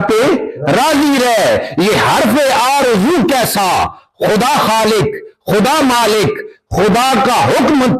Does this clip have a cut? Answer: no; 0 cuts

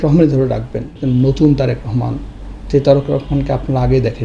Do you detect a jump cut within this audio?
yes; 1 cut; at 1.0 s

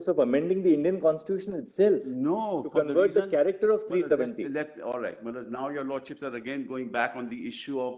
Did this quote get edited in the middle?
no; 0 cuts

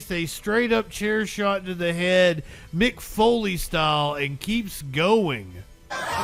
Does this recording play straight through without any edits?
yes; 0 cuts

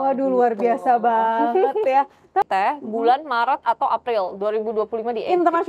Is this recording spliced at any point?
yes; 1 cut; at 2.5 s

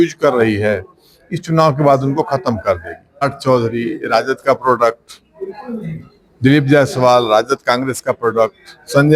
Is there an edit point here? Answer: yes; 1 cut; at 3.2 s

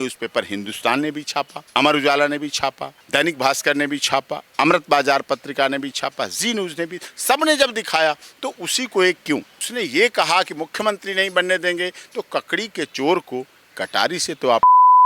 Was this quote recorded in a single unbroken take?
no; 3 cuts; at 1.6 s, 2.9 s, 9.6 s

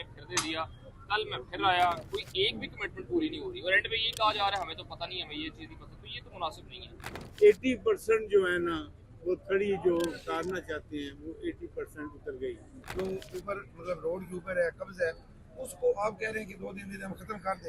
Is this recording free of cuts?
no; 3 cuts; at 2.0 s, 7.2 s, 12.8 s

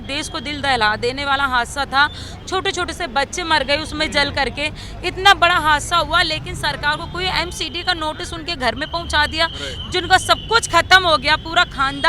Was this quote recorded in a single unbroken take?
yes; 0 cuts

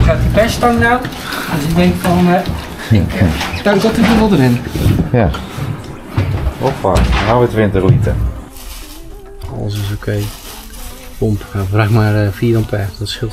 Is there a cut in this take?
yes; 1 cut; at 8.4 s

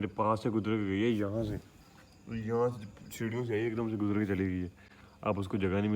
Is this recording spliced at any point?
no; 0 cuts

